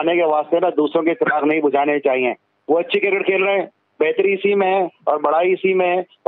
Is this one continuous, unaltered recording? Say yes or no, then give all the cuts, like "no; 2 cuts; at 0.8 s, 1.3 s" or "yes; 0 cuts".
yes; 0 cuts